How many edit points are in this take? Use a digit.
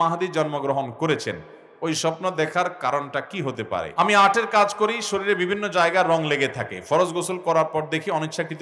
1